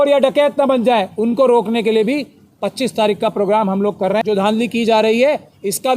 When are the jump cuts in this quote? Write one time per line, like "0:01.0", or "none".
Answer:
0:04.2